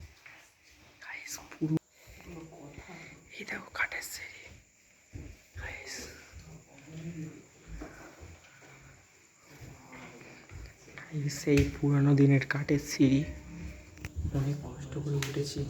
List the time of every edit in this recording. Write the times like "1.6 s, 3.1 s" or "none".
1.8 s